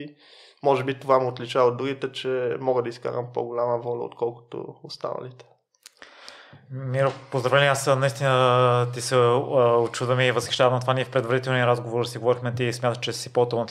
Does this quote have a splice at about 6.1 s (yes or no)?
no